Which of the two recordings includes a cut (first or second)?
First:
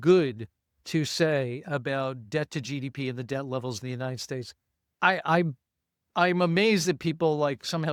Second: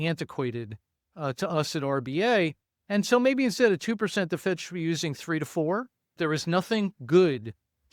second